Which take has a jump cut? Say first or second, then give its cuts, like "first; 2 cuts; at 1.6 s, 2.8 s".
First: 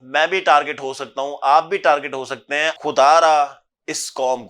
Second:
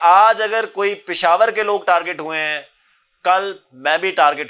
first; 1 cut; at 2.7 s